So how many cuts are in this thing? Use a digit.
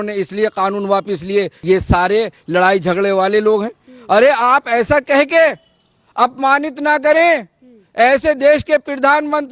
1